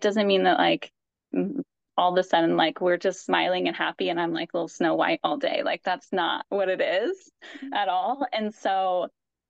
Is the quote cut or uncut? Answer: uncut